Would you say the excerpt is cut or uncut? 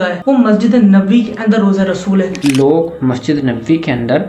cut